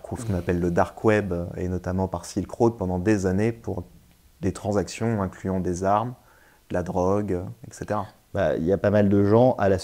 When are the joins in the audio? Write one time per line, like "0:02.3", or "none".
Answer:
none